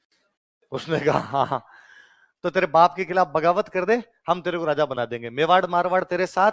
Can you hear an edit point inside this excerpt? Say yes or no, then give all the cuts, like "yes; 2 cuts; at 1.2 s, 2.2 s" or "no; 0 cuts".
no; 0 cuts